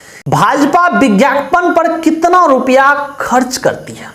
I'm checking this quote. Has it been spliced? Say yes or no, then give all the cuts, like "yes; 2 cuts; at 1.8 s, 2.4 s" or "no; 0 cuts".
no; 0 cuts